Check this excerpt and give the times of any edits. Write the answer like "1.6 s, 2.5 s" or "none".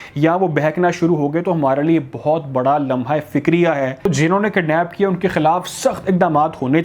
4.1 s